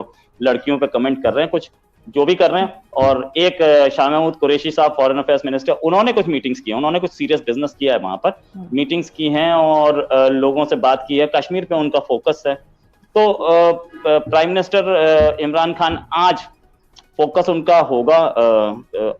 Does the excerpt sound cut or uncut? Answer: uncut